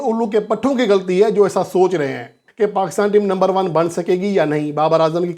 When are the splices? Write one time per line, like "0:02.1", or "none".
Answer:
0:02.4